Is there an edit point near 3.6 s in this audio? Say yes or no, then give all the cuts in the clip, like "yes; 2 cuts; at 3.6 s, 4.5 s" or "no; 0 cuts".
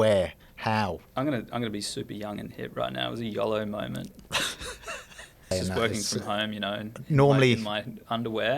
no; 2 cuts; at 1.0 s, 5.5 s